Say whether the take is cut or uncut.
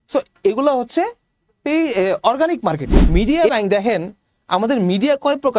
cut